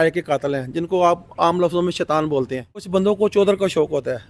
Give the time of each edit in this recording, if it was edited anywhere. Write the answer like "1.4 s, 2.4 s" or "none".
2.9 s